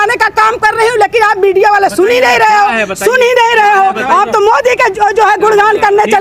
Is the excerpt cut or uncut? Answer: uncut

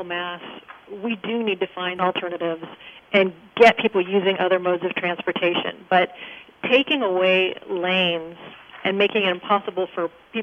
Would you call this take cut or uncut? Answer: cut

